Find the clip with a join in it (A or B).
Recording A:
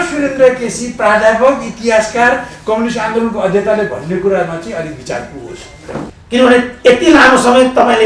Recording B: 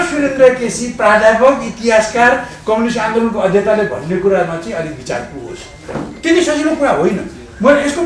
A